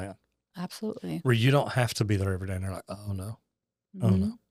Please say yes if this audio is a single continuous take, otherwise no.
yes